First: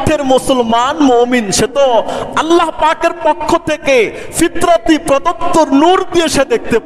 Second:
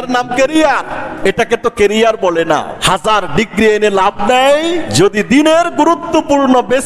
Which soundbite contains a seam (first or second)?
second